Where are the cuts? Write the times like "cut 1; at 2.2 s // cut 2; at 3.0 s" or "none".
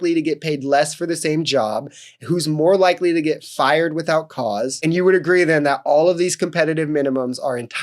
cut 1; at 4.8 s